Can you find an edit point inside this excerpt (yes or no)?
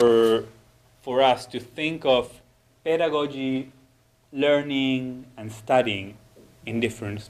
yes